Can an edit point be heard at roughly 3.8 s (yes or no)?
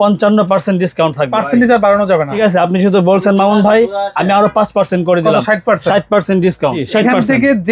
no